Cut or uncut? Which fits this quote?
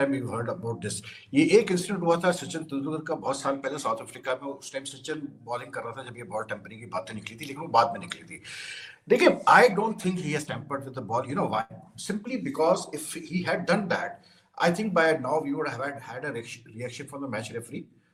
uncut